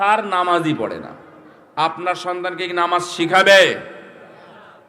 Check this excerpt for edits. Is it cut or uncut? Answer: uncut